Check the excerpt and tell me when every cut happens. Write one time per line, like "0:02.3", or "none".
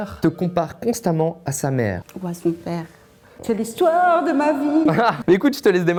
none